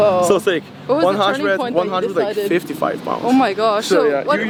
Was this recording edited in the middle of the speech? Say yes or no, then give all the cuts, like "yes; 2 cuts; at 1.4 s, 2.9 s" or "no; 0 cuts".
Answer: no; 0 cuts